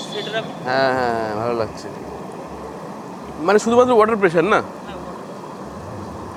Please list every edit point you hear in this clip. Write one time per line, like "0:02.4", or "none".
none